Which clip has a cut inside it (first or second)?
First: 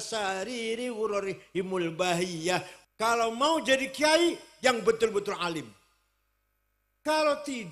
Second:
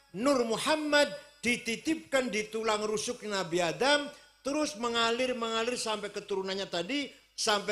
first